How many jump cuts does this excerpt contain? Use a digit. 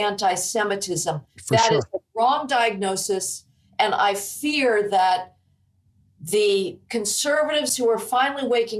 0